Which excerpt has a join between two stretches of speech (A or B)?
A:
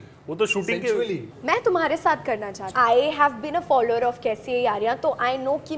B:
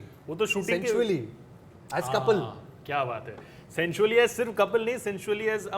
A